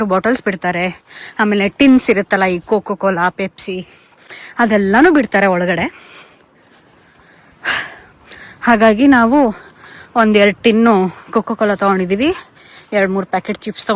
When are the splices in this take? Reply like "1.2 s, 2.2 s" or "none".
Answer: none